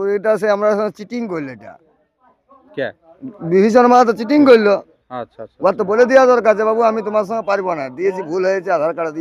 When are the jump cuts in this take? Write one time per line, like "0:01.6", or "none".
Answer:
none